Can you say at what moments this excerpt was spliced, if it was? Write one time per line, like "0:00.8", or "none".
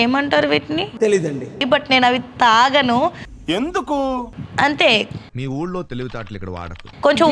0:01.6